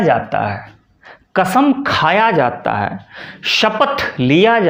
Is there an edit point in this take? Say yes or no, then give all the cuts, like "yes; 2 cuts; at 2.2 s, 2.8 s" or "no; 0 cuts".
no; 0 cuts